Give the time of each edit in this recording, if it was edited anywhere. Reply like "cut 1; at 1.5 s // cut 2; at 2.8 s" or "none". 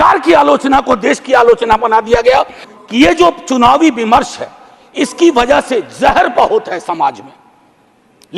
cut 1; at 2.6 s